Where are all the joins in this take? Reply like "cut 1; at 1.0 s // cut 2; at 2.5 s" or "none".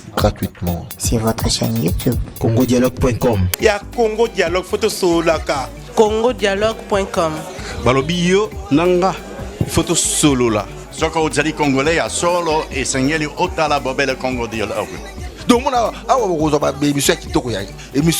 cut 1; at 3.5 s